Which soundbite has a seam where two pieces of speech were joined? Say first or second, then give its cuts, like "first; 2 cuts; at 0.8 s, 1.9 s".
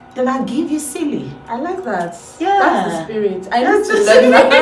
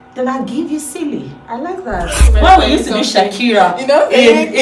second; 1 cut; at 2.3 s